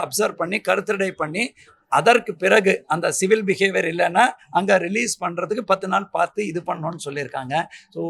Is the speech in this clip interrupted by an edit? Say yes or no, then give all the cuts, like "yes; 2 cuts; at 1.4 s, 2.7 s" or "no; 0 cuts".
no; 0 cuts